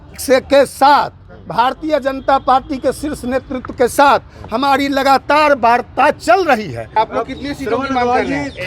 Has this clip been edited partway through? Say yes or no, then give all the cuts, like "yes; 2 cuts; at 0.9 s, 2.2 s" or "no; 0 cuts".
yes; 1 cut; at 6.9 s